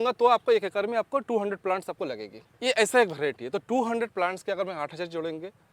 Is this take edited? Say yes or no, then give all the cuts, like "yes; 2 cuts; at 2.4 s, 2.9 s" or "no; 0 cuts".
no; 0 cuts